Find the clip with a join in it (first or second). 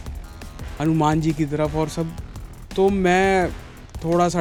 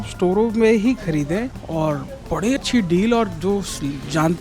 second